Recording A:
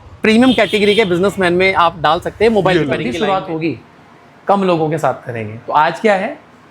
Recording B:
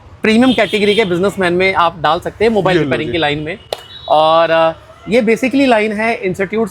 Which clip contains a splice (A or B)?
A